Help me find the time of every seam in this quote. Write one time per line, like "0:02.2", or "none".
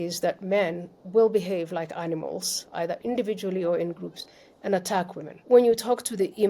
0:05.3